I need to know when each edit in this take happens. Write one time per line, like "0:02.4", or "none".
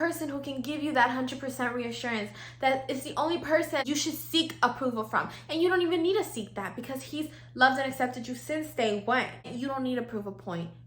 0:03.8
0:09.5